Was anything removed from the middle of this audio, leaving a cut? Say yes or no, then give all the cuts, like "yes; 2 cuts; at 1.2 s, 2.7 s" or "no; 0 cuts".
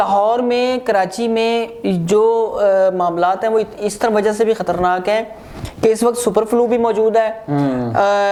no; 0 cuts